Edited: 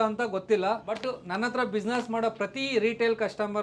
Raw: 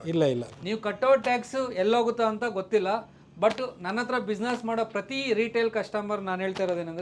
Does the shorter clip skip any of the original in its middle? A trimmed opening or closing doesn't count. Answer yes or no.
yes